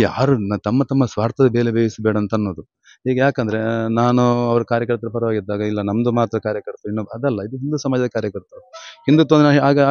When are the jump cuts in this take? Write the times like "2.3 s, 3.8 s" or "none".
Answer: none

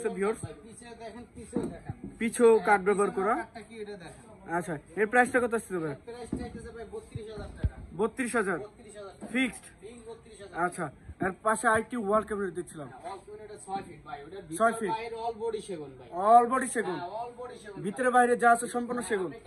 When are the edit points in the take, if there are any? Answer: none

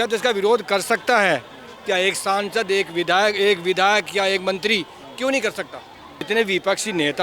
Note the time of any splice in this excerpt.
6.2 s

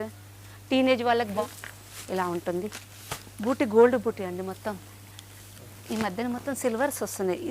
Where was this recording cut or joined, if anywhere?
1.4 s

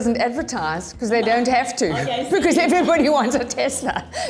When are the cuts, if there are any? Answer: none

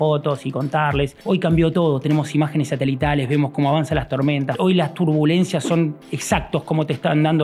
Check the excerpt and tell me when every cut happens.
1.2 s, 4.5 s

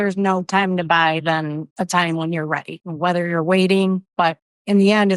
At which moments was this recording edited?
1.6 s, 2.8 s, 4.1 s

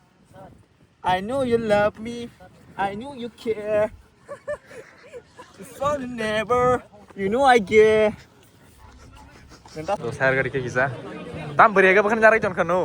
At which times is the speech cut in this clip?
10.0 s

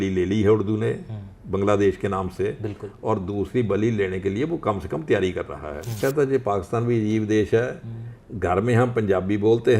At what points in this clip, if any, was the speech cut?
6.0 s

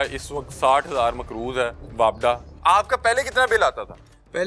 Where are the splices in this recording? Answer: none

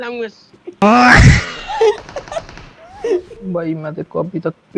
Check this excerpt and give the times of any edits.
3.3 s

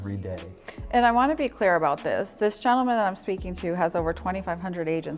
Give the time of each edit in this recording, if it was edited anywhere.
none

